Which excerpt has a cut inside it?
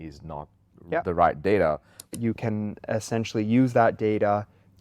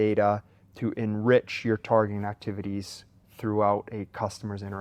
first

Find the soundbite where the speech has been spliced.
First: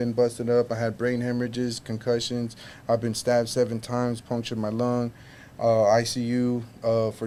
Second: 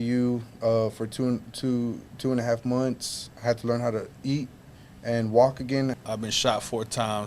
second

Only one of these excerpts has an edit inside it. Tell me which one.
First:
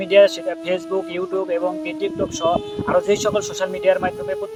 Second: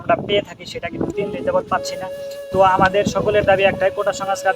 second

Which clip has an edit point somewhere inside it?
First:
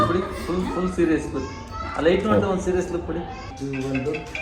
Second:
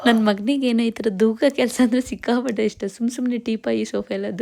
first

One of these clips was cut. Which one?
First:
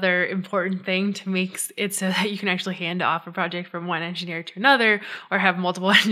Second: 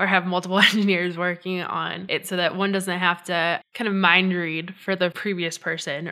second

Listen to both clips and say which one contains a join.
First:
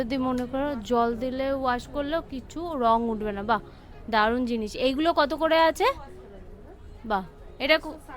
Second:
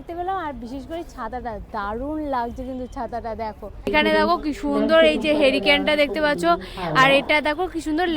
second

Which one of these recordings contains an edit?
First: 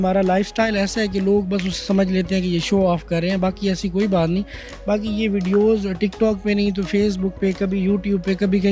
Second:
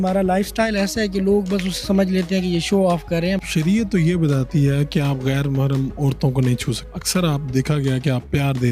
second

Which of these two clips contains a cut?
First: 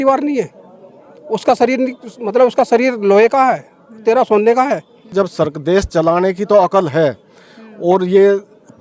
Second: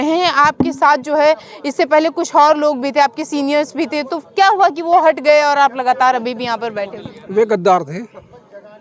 first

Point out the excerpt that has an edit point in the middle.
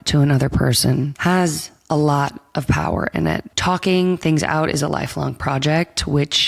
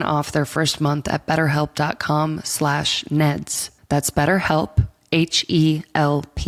first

